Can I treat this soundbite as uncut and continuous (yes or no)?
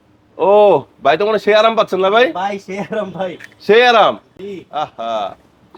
yes